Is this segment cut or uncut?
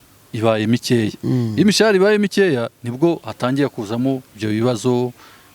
uncut